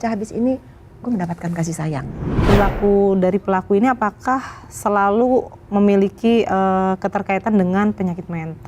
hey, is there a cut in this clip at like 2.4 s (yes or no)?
yes